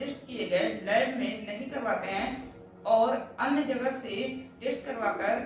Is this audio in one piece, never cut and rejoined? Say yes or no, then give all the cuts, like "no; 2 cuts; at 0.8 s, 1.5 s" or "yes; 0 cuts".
yes; 0 cuts